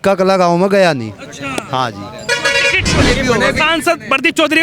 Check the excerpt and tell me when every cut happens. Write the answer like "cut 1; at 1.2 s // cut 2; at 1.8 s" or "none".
cut 1; at 3.0 s